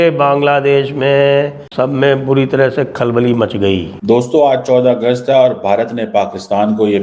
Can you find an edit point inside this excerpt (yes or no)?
yes